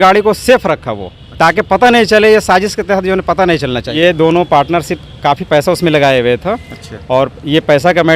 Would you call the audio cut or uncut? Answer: cut